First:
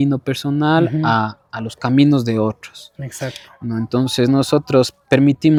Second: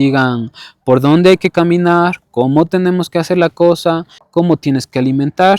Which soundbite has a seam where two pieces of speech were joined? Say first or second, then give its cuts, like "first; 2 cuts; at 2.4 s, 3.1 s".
second; 1 cut; at 4.2 s